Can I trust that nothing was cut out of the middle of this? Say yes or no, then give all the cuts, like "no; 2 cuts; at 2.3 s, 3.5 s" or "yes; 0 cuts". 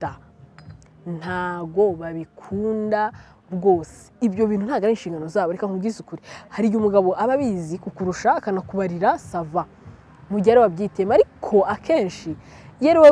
yes; 0 cuts